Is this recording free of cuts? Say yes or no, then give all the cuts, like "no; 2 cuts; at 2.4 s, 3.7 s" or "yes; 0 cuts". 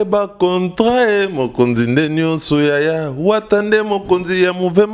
yes; 0 cuts